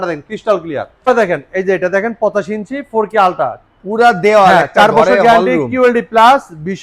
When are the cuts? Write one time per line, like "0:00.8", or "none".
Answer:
0:01.1